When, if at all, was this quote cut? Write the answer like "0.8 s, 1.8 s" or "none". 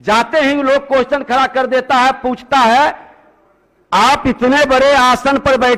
none